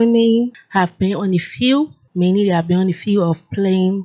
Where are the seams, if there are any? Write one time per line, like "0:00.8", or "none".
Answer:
none